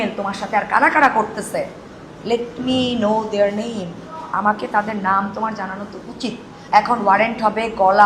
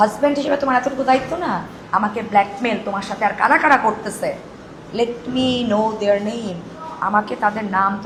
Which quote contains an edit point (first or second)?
first